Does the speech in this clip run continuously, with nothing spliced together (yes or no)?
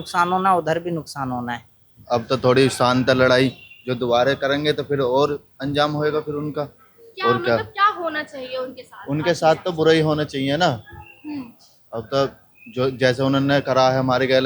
no